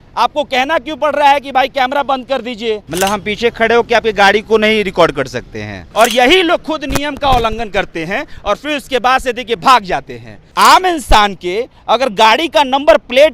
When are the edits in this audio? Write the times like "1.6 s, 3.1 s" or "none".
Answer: 2.9 s, 5.8 s, 10.4 s